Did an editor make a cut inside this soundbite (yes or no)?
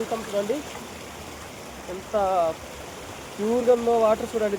no